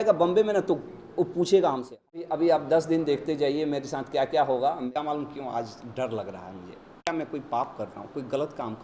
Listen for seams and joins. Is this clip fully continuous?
no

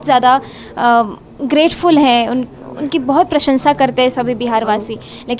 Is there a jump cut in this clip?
no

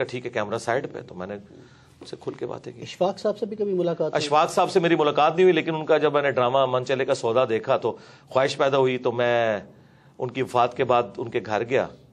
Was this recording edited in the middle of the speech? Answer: no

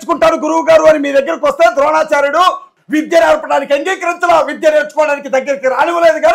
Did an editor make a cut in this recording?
yes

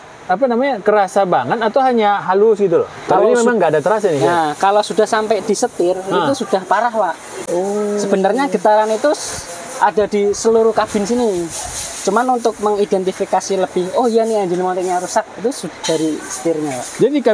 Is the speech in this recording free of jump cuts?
yes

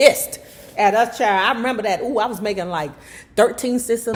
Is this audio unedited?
yes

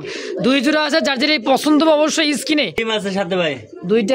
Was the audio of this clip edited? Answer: yes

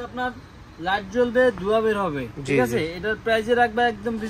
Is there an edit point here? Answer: no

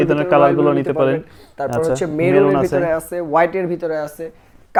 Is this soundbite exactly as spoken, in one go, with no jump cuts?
yes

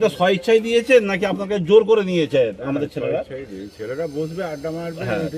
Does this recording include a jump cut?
no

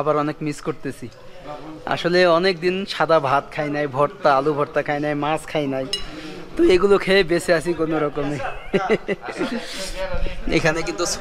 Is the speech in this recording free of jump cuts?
yes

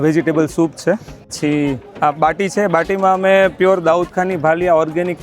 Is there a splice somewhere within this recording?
yes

